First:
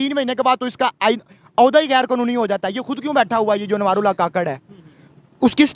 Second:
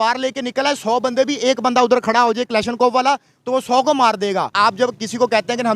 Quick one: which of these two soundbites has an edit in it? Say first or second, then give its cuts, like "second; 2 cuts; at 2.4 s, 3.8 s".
second; 1 cut; at 4.5 s